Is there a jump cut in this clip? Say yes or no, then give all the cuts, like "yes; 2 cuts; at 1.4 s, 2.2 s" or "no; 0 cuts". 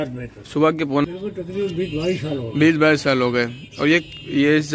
yes; 1 cut; at 1.0 s